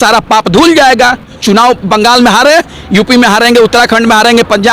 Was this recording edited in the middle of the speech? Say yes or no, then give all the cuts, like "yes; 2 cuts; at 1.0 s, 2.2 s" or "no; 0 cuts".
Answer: yes; 1 cut; at 1.3 s